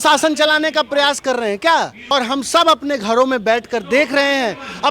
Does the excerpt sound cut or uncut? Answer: cut